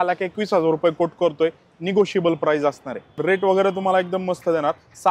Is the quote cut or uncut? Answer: cut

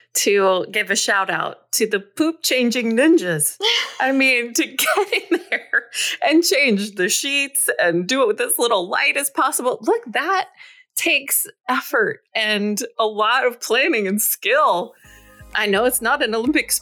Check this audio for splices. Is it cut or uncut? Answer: uncut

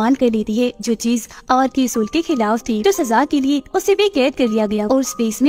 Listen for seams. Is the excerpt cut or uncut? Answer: uncut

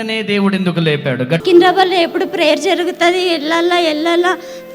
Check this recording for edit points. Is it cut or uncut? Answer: cut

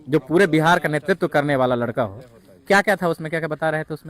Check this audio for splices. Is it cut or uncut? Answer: cut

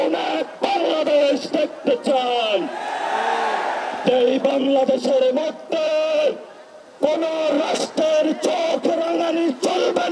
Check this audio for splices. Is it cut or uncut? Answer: uncut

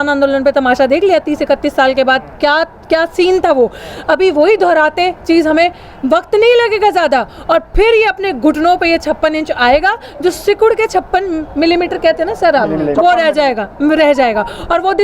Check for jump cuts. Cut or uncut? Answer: uncut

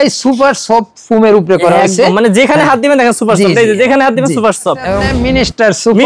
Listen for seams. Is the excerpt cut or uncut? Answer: cut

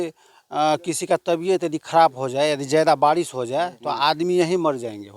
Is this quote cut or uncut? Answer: uncut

